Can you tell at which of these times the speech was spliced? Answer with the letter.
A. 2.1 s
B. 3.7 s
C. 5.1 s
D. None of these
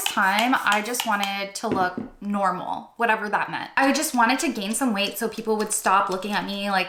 D